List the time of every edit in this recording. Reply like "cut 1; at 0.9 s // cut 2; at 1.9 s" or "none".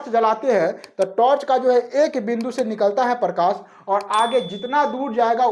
none